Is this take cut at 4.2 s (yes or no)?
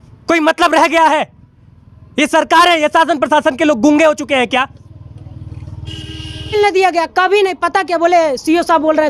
no